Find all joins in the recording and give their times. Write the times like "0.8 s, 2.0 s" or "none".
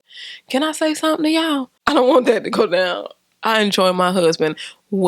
1.7 s